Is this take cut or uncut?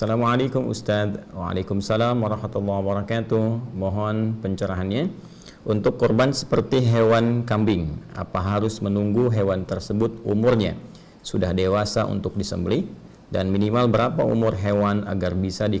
uncut